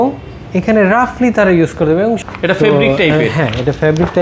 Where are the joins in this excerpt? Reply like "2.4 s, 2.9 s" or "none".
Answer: 2.2 s